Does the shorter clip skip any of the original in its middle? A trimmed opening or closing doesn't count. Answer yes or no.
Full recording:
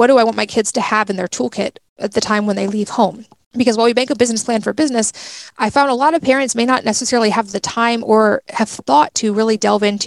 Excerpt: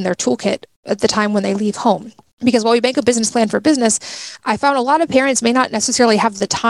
no